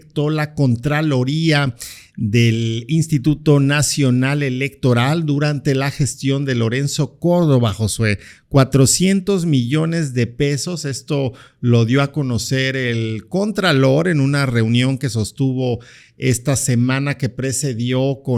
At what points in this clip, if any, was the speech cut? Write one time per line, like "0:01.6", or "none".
none

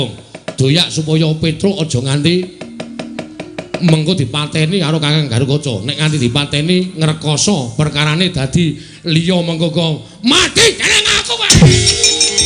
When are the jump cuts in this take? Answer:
none

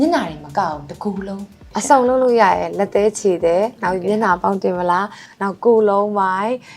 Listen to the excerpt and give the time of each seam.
0:01.7

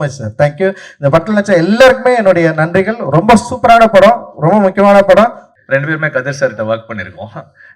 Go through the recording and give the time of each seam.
0:05.5

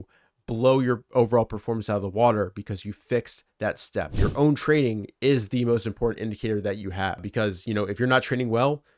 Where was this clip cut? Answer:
0:04.2
0:07.2

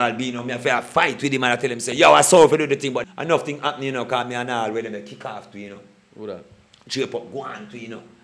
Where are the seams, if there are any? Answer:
0:03.0

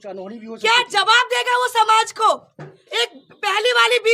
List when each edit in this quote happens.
none

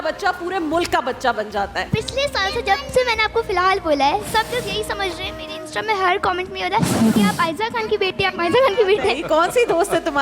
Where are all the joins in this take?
0:01.9
0:09.2

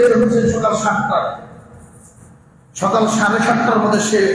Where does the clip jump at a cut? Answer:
none

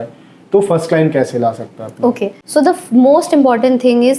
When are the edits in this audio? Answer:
0:02.4

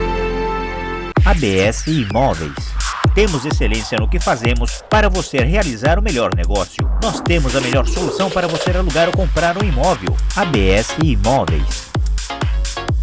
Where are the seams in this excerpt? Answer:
0:01.0

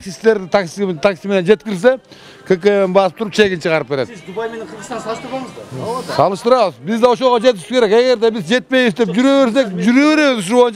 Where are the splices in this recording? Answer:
none

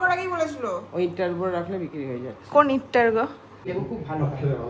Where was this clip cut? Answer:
0:03.7

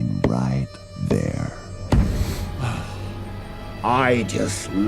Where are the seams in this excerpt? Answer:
0:02.5

